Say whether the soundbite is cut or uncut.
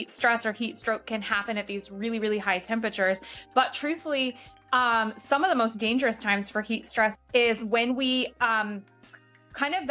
uncut